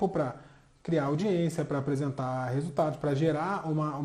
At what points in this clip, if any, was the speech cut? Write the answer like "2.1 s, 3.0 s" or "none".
none